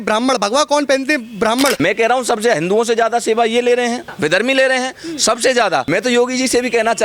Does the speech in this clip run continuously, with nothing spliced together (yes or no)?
no